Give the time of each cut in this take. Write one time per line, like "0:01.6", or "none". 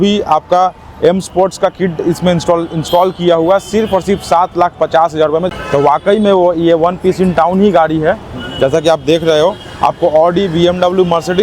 0:05.5